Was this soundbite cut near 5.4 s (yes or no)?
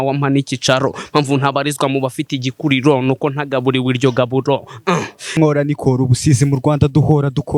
yes